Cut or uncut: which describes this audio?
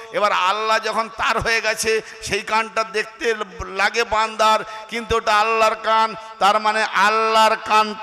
uncut